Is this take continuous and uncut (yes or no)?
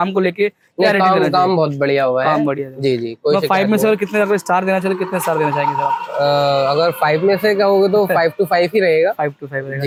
yes